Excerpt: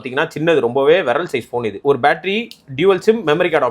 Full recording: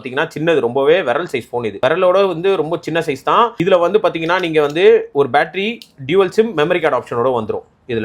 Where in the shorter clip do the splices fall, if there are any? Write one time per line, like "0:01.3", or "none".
0:01.8